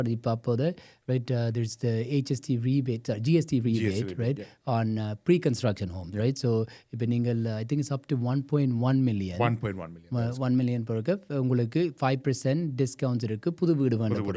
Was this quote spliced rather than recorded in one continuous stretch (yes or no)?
no